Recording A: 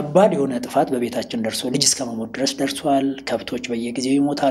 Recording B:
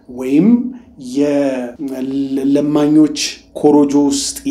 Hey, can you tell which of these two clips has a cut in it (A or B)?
B